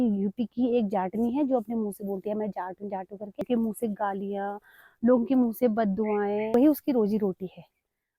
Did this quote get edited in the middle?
yes; 2 cuts; at 3.4 s, 6.5 s

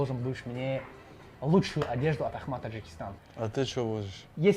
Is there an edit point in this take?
yes; 1 cut; at 3.2 s

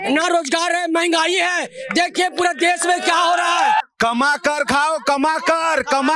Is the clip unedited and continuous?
no; 1 cut; at 3.8 s

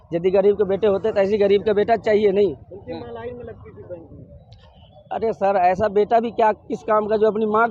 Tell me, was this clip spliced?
no; 0 cuts

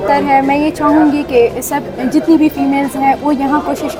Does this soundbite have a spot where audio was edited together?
no; 0 cuts

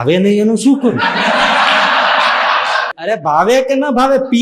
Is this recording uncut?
no; 1 cut; at 2.9 s

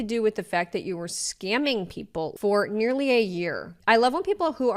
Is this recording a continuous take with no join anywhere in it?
no; 2 cuts; at 2.3 s, 3.7 s

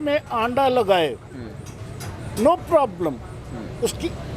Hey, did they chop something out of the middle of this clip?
no; 0 cuts

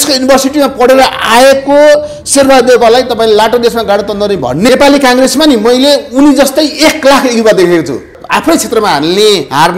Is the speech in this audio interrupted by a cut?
yes; 2 cuts; at 4.7 s, 8.1 s

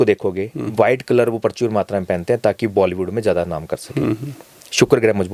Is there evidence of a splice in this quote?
no; 0 cuts

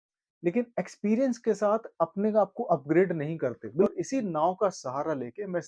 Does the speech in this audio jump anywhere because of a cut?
yes; 1 cut; at 3.9 s

